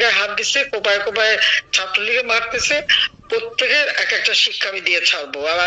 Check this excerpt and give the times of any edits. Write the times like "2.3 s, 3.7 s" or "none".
none

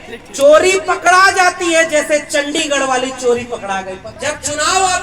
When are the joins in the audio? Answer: 4.0 s

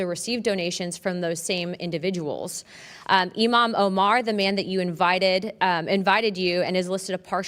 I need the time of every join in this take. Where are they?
none

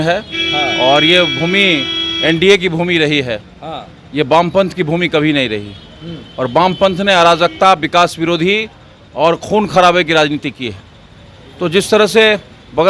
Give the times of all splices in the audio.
none

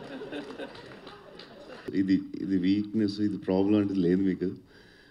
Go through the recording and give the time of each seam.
1.8 s

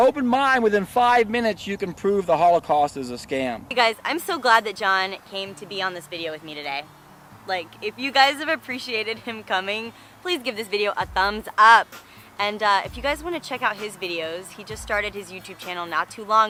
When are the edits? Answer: none

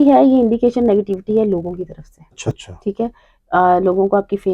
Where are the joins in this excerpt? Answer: 2.4 s

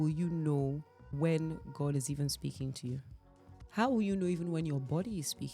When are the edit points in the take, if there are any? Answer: 1.2 s

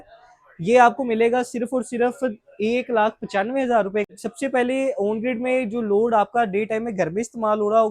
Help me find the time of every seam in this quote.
4.1 s

